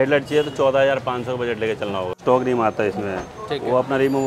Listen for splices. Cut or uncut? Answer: cut